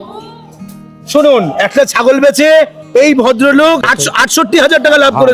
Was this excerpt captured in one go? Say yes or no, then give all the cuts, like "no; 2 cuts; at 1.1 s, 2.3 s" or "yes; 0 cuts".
no; 1 cut; at 3.9 s